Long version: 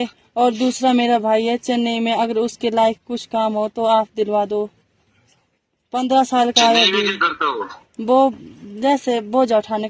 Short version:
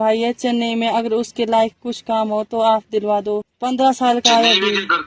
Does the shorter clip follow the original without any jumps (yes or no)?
no